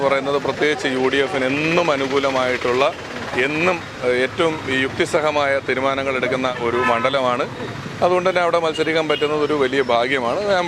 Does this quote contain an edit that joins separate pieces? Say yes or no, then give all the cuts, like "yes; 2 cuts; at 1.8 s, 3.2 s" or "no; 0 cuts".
no; 0 cuts